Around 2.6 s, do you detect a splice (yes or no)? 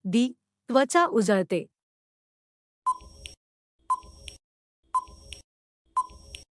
yes